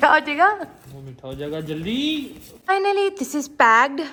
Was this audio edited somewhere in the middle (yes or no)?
no